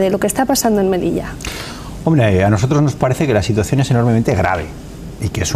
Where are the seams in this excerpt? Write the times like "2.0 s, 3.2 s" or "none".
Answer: 2.1 s